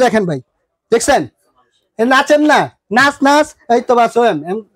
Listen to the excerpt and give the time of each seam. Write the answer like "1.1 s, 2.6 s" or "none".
none